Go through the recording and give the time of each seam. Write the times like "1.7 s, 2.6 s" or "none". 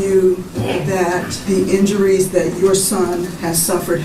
1.3 s